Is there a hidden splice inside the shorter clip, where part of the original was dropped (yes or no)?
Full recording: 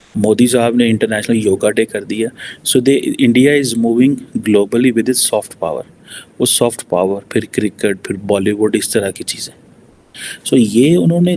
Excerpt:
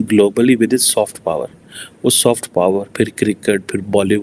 no